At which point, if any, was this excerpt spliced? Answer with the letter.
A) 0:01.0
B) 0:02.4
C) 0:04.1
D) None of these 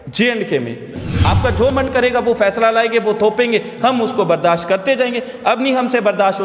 A